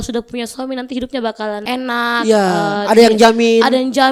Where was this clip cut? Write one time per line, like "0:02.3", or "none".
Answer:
0:01.6